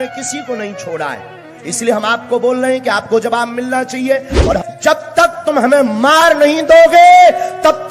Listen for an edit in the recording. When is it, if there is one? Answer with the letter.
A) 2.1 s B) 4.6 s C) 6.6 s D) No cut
B